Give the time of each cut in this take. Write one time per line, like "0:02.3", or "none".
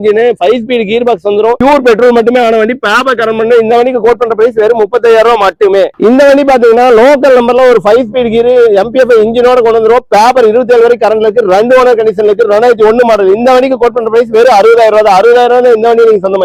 none